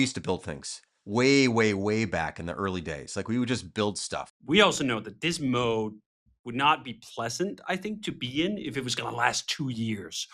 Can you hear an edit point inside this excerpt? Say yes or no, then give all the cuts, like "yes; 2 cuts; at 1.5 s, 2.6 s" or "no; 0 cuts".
yes; 1 cut; at 4.2 s